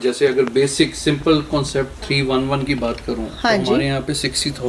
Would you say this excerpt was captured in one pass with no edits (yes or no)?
yes